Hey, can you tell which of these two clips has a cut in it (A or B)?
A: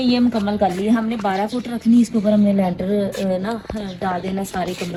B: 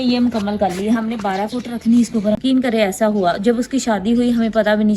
B